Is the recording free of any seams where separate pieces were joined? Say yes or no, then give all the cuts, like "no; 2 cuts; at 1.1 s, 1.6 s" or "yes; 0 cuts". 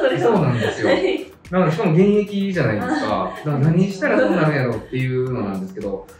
yes; 0 cuts